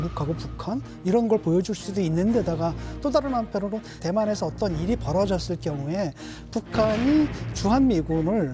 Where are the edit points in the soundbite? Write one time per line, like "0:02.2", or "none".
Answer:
none